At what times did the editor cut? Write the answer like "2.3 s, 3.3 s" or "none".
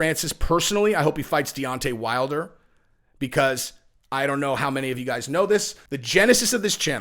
5.8 s